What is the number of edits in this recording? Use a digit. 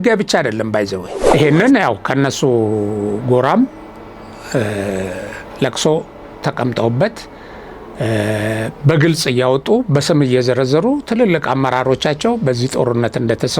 1